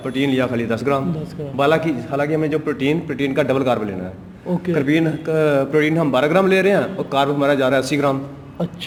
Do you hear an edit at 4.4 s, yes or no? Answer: no